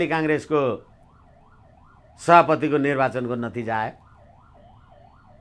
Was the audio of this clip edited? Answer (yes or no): no